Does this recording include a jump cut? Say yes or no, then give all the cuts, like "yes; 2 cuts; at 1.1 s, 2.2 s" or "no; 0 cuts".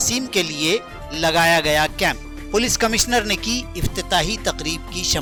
no; 0 cuts